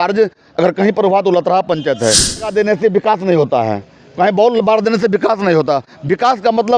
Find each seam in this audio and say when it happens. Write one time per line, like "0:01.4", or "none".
0:02.5